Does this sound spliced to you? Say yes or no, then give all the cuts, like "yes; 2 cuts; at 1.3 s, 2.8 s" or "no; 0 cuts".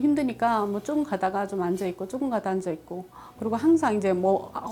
no; 0 cuts